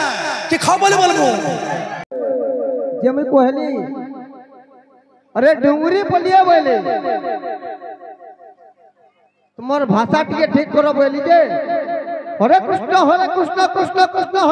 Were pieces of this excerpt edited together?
yes; 1 cut; at 2.1 s

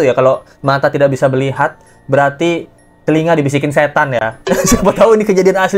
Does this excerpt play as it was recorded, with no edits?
yes; 0 cuts

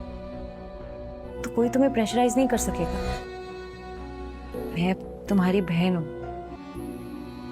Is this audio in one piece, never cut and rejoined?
no; 1 cut; at 1.2 s

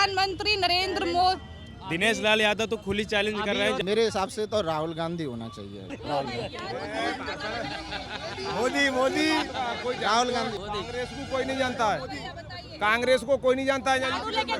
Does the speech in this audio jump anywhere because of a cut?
yes; 3 cuts; at 3.8 s, 6.0 s, 10.6 s

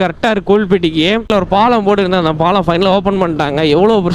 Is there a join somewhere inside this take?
yes; 1 cut; at 1.3 s

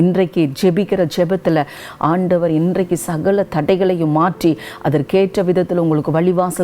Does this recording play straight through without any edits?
no; 1 cut; at 1.8 s

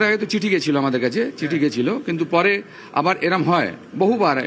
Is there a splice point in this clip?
no; 0 cuts

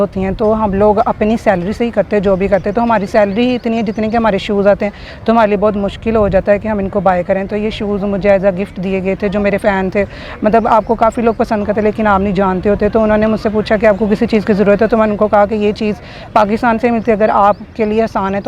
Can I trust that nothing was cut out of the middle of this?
yes; 0 cuts

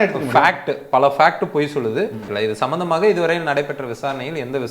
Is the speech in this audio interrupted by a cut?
yes; 1 cut; at 2.3 s

